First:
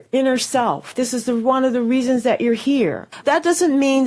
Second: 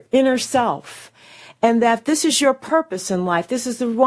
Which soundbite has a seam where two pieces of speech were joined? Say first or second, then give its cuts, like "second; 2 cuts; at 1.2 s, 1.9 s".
first; 2 cuts; at 0.9 s, 3.1 s